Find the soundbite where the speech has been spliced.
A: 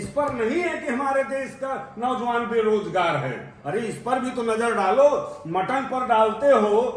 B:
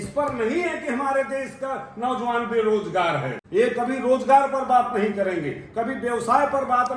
B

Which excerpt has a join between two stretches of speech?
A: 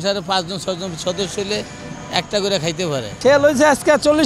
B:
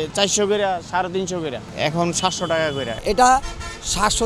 B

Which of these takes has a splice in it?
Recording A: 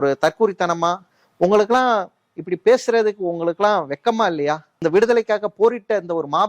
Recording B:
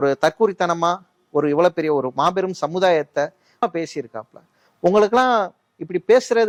A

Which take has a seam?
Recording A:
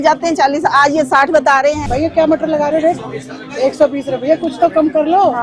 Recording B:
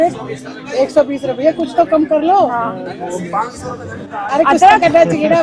A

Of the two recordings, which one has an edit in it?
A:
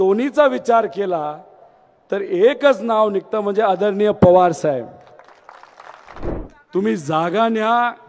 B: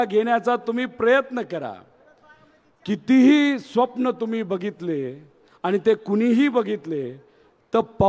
A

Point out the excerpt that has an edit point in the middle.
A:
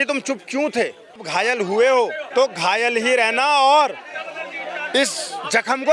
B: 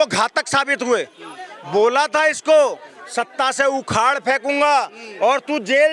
A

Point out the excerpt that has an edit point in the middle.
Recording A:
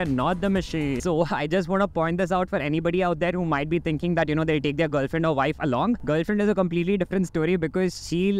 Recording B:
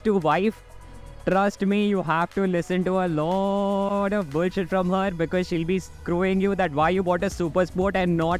A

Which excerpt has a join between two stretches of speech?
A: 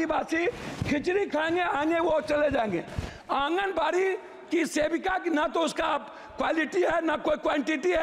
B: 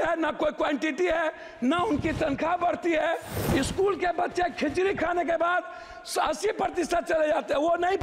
B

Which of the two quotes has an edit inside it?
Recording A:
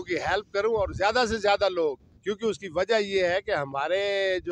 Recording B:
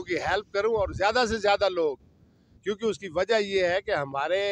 A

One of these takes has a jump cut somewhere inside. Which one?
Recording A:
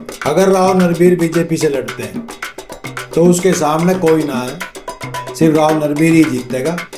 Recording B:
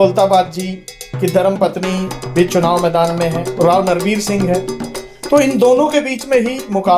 B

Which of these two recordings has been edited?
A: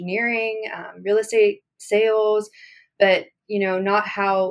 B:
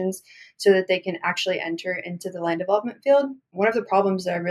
B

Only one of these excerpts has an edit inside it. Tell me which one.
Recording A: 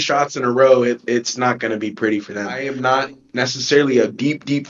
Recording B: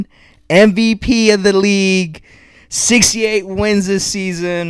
A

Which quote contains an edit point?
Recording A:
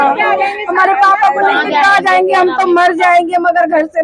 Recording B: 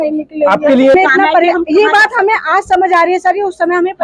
B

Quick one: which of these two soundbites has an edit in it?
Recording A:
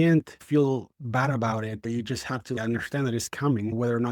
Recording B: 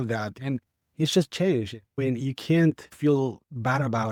A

